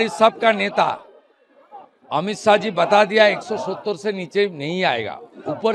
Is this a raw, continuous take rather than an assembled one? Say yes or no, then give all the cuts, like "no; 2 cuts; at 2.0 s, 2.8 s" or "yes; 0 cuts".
yes; 0 cuts